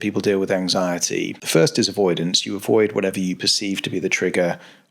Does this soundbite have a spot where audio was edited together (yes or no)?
yes